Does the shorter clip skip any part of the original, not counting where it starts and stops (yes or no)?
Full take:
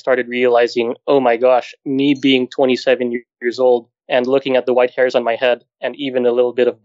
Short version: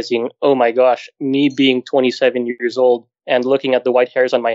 yes